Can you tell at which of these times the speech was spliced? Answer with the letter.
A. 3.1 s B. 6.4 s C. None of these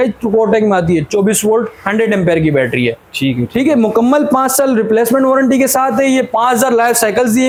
C